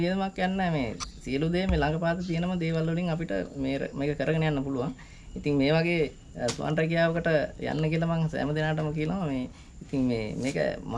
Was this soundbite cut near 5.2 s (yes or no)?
no